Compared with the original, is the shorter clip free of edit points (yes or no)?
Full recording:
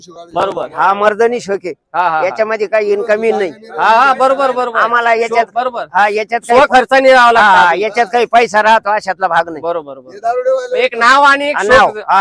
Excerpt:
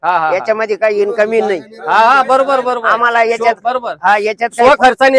yes